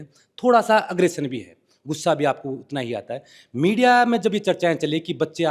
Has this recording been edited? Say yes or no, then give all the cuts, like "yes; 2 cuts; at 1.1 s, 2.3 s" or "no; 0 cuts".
no; 0 cuts